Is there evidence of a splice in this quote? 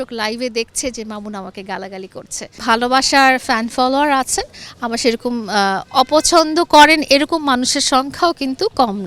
yes; 1 cut; at 2.6 s

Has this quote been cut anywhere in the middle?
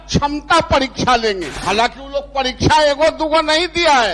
yes; 1 cut; at 1.5 s

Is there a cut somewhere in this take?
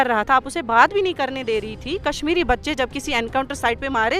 no; 0 cuts

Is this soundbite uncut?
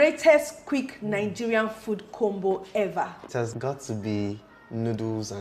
no; 1 cut; at 3.2 s

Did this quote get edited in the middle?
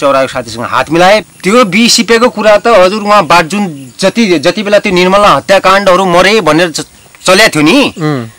yes; 1 cut; at 1.2 s

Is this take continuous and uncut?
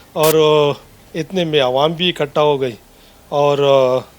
no; 1 cut; at 0.9 s

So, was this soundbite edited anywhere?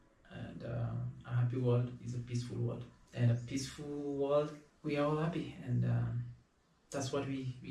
yes; 2 cuts; at 3.0 s, 4.7 s

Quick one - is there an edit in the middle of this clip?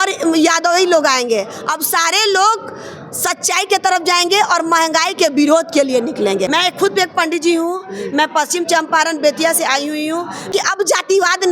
yes; 2 cuts; at 6.5 s, 10.5 s

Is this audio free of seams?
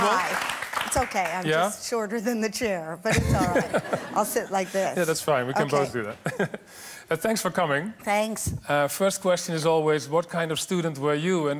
yes; 0 cuts

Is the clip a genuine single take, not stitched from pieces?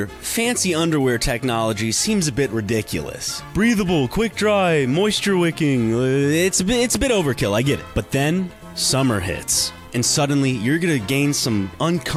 yes; 0 cuts

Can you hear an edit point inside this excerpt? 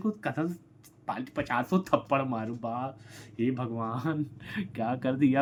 no; 0 cuts

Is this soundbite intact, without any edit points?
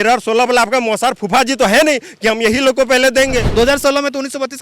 no; 1 cut; at 3.5 s

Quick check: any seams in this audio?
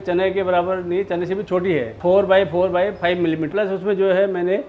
yes; 2 cuts; at 2.0 s, 3.5 s

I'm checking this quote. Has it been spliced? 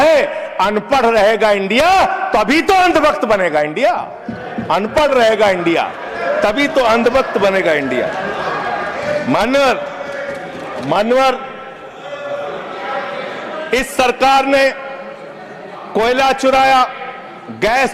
no; 0 cuts

